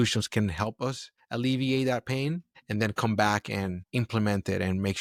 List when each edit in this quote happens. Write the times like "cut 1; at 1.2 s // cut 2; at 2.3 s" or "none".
none